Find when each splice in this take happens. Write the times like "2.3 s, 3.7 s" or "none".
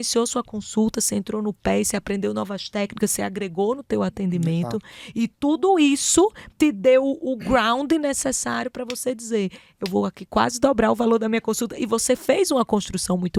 none